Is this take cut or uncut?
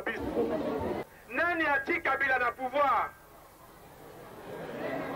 cut